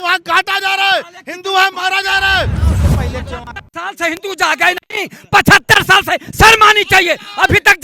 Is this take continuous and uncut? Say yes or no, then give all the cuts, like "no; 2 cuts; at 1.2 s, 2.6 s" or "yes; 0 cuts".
no; 1 cut; at 2.8 s